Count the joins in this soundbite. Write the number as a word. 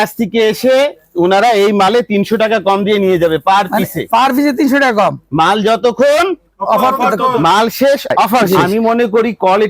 one